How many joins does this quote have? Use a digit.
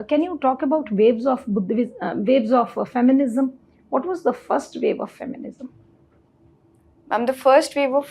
0